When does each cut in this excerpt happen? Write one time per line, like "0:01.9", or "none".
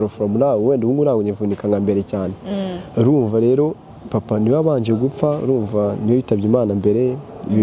none